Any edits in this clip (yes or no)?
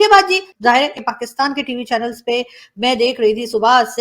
yes